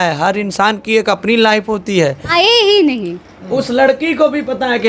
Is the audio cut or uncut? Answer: cut